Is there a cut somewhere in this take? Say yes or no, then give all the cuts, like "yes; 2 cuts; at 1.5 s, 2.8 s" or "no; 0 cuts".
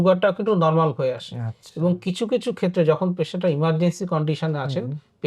no; 0 cuts